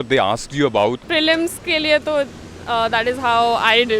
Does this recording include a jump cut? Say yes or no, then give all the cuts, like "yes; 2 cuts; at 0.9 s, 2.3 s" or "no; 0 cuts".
yes; 1 cut; at 1.0 s